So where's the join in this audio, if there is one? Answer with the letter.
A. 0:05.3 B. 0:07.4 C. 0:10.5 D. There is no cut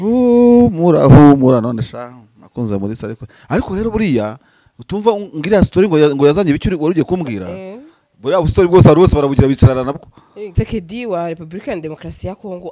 C